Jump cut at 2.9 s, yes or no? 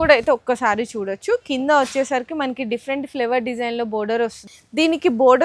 no